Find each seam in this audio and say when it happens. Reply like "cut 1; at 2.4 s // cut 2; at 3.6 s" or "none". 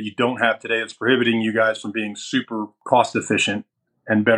cut 1; at 2.7 s